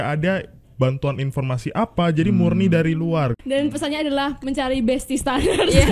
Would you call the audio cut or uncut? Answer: cut